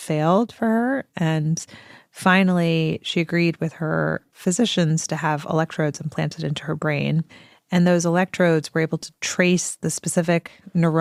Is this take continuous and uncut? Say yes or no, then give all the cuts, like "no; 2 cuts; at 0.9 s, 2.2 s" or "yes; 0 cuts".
yes; 0 cuts